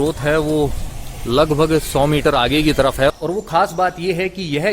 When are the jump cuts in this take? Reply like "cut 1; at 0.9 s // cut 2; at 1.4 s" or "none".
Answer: cut 1; at 3.1 s

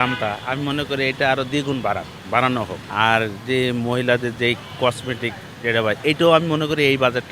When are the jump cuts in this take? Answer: none

